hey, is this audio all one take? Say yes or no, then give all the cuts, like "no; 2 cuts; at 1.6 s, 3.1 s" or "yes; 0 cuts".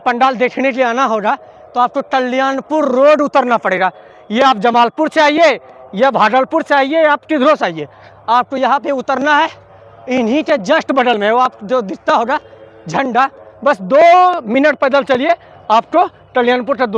yes; 0 cuts